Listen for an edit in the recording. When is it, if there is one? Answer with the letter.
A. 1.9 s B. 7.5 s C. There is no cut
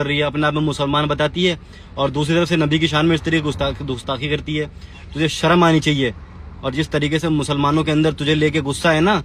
C